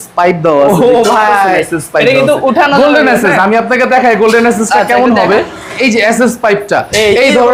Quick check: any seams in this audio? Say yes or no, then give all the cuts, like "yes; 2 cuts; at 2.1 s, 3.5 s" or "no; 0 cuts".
no; 0 cuts